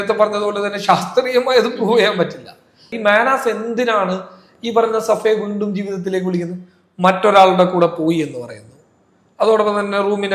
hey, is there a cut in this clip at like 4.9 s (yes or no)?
no